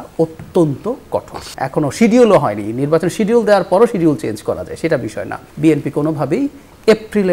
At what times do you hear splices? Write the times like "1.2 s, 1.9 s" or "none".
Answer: 1.5 s, 5.4 s

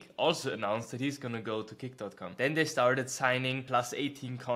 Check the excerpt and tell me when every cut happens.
2.2 s, 3.6 s

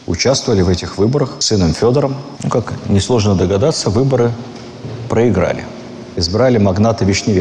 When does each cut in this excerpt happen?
none

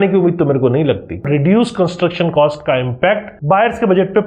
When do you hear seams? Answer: 1.3 s

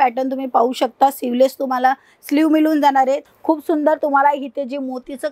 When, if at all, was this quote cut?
3.2 s

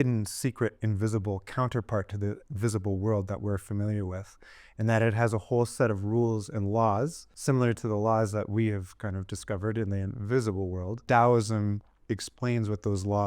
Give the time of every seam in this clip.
7.3 s, 11.0 s

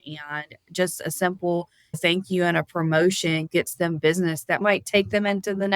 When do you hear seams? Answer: 4.6 s

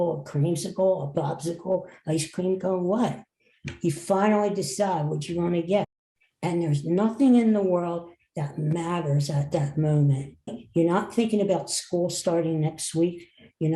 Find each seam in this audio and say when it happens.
5.9 s, 10.6 s

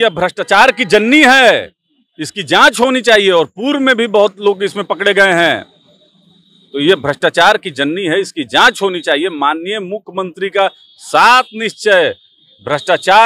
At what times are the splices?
none

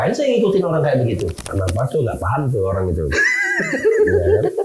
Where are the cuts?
1.6 s

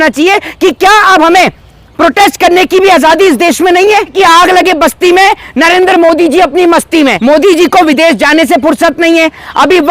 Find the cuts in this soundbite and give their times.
4.1 s, 7.2 s

